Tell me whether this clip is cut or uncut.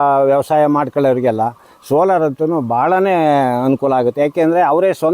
uncut